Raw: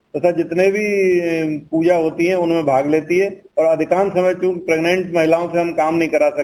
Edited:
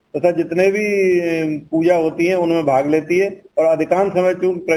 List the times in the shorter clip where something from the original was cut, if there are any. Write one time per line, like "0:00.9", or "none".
none